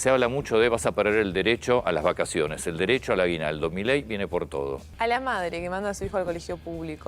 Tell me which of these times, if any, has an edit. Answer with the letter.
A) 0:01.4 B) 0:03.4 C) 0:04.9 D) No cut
C